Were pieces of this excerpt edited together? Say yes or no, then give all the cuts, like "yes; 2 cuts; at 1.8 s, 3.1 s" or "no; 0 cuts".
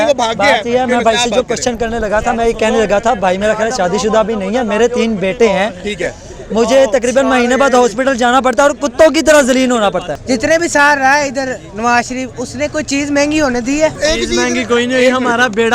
yes; 2 cuts; at 10.1 s, 14.0 s